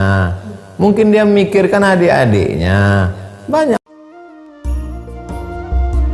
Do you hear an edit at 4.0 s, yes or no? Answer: yes